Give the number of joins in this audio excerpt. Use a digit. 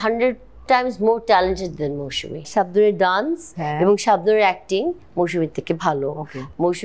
1